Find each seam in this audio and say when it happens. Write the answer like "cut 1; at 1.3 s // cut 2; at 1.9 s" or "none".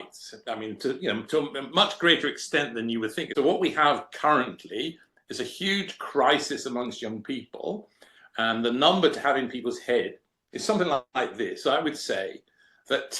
cut 1; at 3.2 s